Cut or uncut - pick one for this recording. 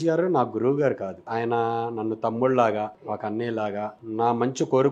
cut